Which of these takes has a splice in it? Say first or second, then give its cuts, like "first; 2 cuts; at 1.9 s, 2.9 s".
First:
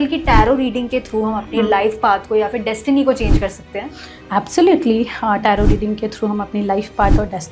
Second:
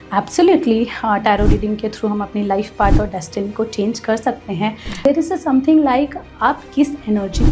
second; 1 cut; at 5.0 s